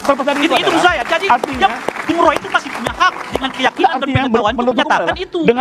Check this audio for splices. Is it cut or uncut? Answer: uncut